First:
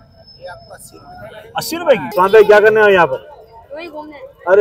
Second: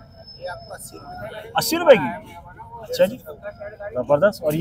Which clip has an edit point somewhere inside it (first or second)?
first